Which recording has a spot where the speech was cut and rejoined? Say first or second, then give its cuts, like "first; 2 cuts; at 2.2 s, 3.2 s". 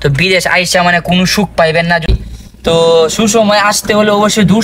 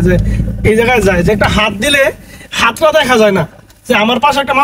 first; 1 cut; at 2.1 s